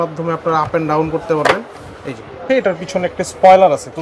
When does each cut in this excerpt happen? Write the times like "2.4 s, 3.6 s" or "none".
2.4 s